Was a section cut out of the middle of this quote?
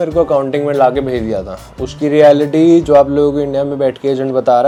no; 0 cuts

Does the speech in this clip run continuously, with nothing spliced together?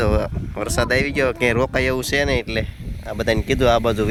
yes; 0 cuts

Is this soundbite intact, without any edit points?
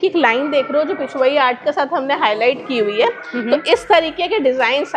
yes; 0 cuts

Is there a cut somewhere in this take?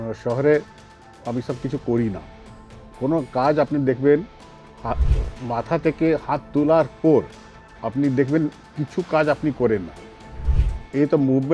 no; 0 cuts

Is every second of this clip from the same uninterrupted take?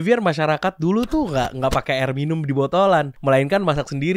yes; 0 cuts

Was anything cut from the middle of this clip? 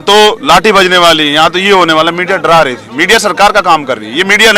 no; 0 cuts

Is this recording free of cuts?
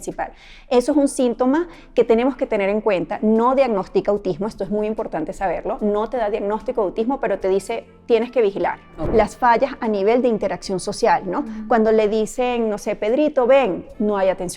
no; 1 cut; at 8.9 s

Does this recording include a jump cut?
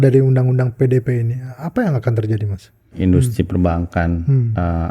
yes; 1 cut; at 2.9 s

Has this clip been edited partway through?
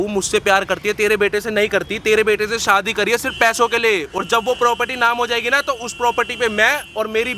no; 0 cuts

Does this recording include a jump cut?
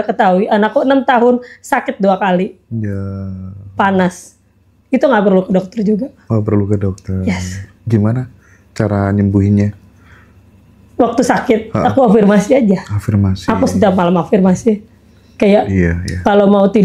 no; 0 cuts

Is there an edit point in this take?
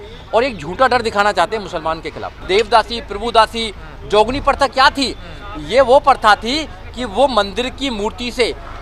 yes; 1 cut; at 2.3 s

